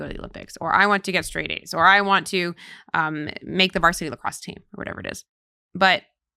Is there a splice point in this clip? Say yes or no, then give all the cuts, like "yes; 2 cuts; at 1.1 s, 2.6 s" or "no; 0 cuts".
no; 0 cuts